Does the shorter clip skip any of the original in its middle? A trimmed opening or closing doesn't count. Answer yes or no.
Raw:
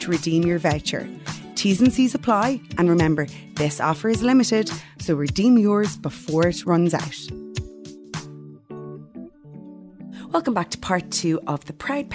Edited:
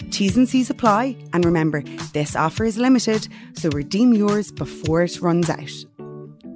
yes